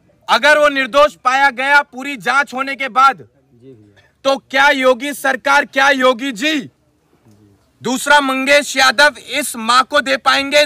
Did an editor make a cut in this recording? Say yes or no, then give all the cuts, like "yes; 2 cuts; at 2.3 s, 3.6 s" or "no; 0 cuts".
no; 0 cuts